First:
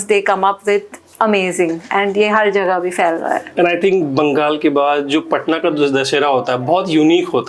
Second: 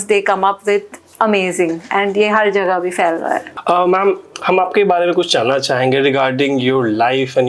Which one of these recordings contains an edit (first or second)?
second